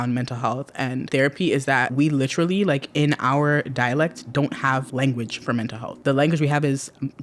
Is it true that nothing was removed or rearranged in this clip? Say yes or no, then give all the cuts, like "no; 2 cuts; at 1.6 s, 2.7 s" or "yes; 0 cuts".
no; 4 cuts; at 1.1 s, 1.9 s, 4.9 s, 5.9 s